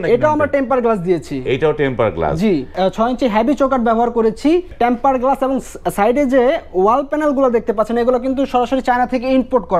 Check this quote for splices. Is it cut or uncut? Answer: cut